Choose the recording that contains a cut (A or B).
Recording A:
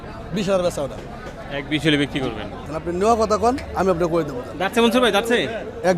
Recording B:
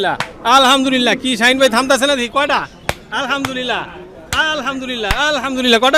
A